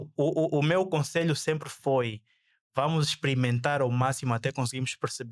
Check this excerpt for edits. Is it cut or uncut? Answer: uncut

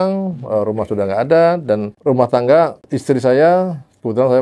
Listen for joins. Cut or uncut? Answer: cut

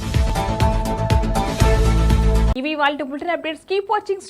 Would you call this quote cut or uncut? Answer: uncut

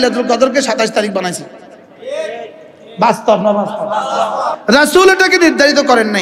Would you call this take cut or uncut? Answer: cut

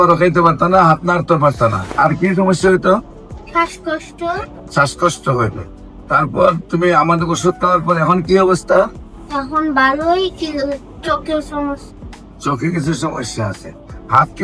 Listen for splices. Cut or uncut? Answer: cut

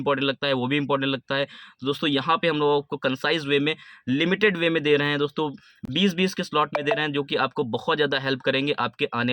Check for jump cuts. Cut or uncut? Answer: uncut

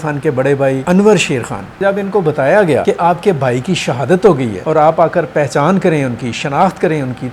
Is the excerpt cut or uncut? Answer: cut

